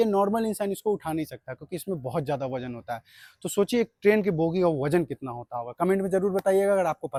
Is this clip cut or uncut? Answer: uncut